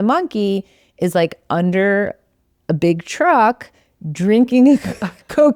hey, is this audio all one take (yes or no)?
yes